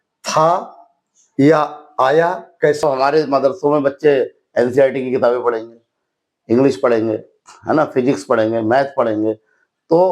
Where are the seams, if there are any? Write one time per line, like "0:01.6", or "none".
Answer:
0:02.8